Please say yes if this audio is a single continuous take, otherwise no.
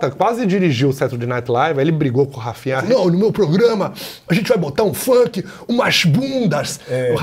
no